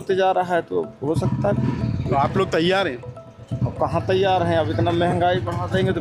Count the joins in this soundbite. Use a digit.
0